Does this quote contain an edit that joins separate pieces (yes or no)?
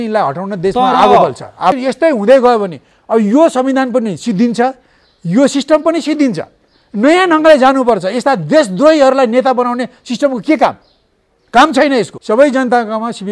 yes